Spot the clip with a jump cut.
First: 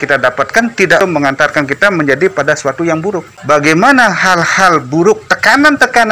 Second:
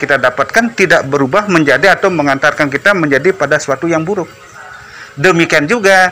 first; 2 cuts; at 1.0 s, 3.3 s

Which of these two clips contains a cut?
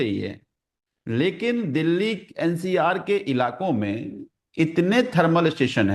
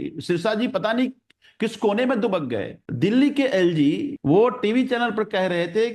second; 2 cuts; at 2.8 s, 4.1 s

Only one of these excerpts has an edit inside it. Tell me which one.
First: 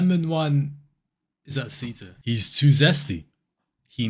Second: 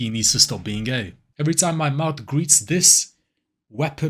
second; 1 cut; at 1.3 s

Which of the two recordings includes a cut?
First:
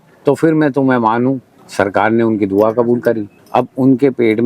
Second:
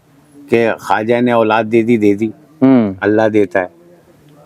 first; 2 cuts; at 1.5 s, 3.3 s

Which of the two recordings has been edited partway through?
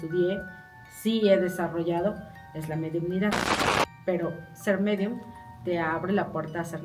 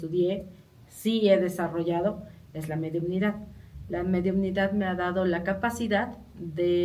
first; 1 cut; at 3.8 s

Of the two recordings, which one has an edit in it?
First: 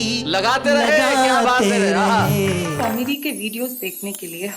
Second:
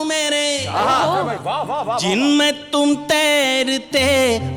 first; 1 cut; at 2.7 s

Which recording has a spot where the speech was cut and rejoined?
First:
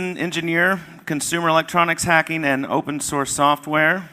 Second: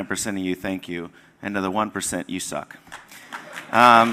first; 1 cut; at 2.4 s

